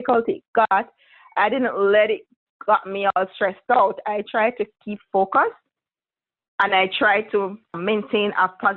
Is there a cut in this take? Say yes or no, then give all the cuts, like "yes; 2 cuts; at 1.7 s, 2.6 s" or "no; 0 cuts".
yes; 1 cut; at 7.8 s